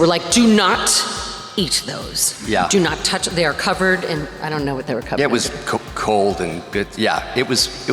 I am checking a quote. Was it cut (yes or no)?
no